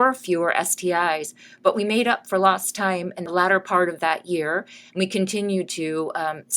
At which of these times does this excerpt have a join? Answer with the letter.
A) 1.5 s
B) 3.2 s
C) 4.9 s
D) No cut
B